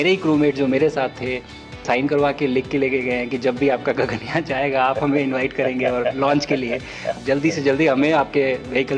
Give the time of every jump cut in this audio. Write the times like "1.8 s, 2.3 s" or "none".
1.8 s, 7.1 s